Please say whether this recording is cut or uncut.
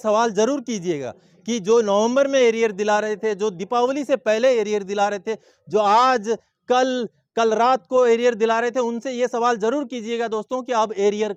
uncut